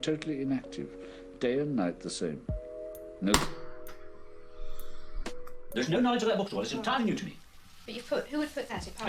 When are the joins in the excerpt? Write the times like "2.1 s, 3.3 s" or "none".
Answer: 5.6 s